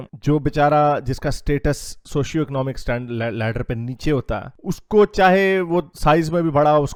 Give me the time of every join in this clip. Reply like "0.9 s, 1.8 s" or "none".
none